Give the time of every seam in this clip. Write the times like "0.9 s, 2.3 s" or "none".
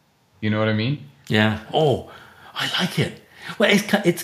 1.7 s